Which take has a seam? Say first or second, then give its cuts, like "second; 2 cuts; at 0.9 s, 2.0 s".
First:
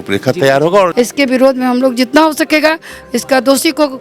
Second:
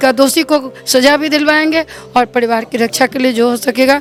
first; 1 cut; at 0.9 s